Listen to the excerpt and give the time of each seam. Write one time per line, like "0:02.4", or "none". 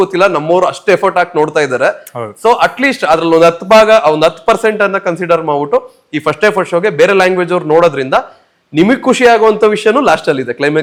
none

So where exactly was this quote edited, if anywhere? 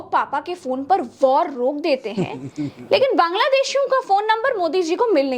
none

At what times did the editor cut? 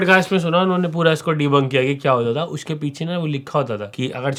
none

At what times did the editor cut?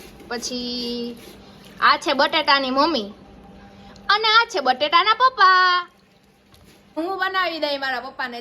0:07.0

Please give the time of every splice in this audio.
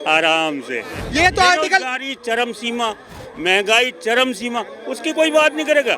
0:00.9

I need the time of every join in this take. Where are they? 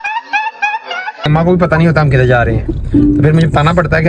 0:01.3

